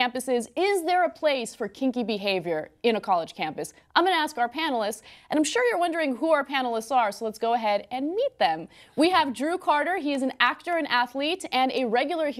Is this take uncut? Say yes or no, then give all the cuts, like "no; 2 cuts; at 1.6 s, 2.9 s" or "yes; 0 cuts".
yes; 0 cuts